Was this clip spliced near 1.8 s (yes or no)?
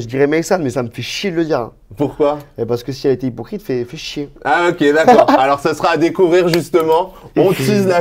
no